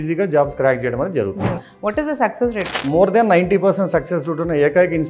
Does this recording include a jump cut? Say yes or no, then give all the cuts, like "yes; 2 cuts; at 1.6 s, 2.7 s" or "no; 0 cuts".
yes; 2 cuts; at 1.7 s, 2.9 s